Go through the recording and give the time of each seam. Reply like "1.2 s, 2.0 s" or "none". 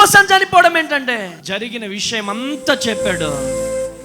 1.4 s